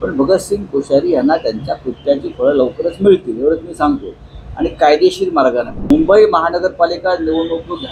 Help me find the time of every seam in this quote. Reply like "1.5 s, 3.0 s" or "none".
5.8 s